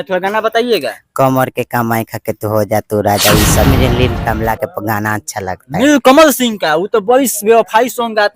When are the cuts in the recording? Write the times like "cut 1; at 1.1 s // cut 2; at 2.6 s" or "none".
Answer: cut 1; at 3.7 s